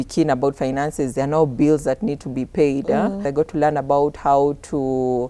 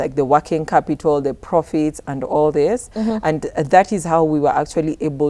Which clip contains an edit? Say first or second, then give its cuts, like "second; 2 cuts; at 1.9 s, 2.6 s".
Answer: first; 1 cut; at 3.2 s